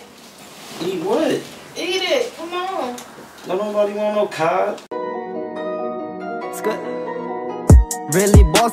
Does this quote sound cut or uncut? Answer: cut